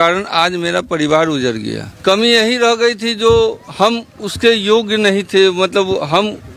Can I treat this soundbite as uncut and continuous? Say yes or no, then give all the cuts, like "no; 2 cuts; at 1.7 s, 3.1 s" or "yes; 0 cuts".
no; 1 cut; at 1.8 s